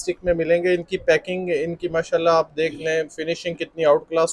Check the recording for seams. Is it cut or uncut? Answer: uncut